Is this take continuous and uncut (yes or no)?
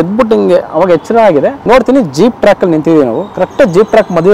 no